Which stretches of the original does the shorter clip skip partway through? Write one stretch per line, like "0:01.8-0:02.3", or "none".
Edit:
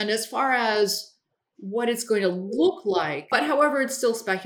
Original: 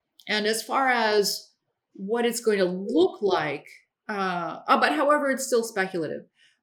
0:03.7-0:04.8